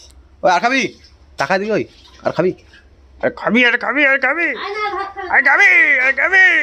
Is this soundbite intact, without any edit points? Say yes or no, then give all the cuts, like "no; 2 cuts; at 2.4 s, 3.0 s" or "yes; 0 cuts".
yes; 0 cuts